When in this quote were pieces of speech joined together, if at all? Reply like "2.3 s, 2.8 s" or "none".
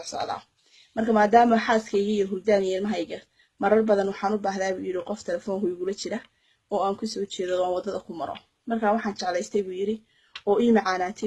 1.9 s

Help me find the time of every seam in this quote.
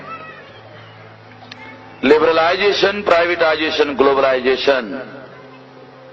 none

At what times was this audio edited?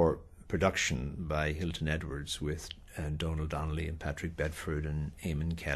4.3 s

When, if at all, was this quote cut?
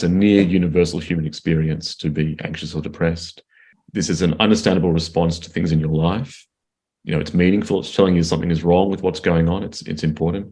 3.8 s

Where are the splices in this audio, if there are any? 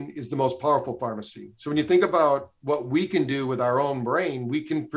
none

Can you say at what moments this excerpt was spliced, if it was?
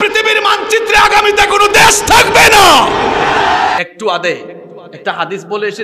3.8 s

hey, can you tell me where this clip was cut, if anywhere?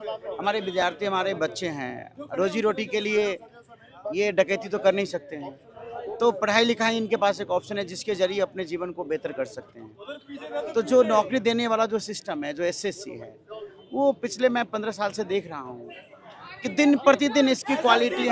none

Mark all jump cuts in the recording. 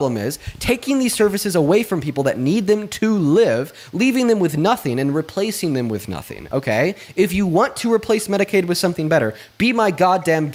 none

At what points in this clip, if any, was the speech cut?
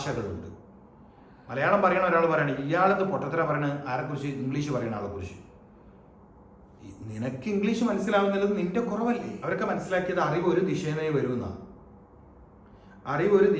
9.3 s

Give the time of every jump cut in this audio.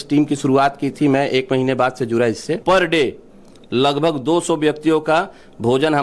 2.6 s

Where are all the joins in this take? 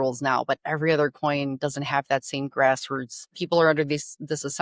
3.4 s

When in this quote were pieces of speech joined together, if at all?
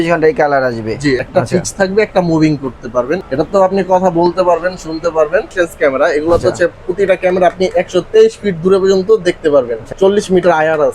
1.2 s, 3.2 s, 5.5 s, 9.8 s

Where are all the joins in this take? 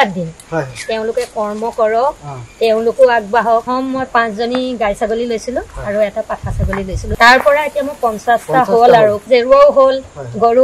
3.7 s, 7.0 s, 9.2 s

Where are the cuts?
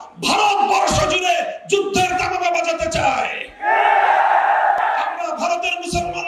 4.8 s

